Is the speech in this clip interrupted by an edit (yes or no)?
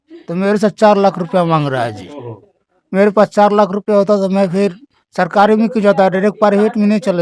no